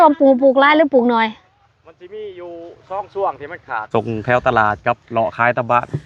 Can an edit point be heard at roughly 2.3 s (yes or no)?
no